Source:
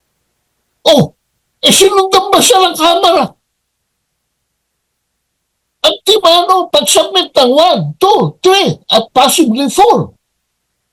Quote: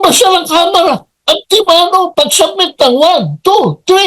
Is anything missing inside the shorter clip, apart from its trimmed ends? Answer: yes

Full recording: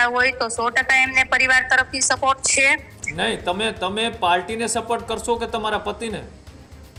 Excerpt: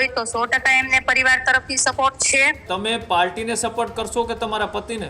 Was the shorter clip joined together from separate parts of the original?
yes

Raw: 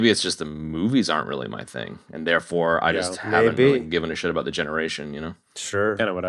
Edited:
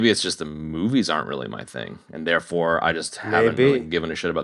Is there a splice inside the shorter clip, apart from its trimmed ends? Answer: no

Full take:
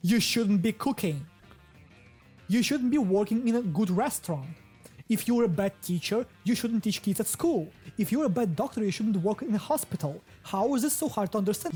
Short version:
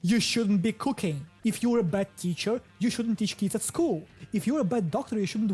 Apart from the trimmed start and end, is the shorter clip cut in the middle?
yes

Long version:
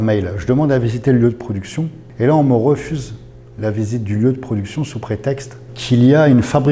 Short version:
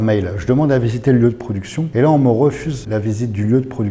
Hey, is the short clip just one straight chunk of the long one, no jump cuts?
no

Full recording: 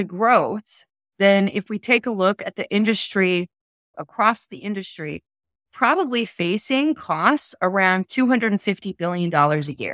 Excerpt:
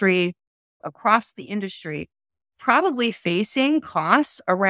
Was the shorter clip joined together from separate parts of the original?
no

